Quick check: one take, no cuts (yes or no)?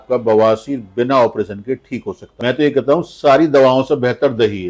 no